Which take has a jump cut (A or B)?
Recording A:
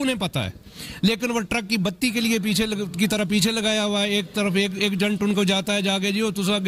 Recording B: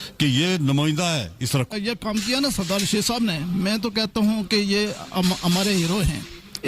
B